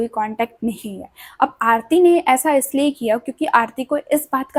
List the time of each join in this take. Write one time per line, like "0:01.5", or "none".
none